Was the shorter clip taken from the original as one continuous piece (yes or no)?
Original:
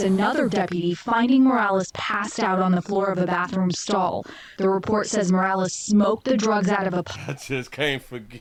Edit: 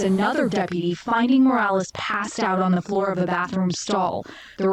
yes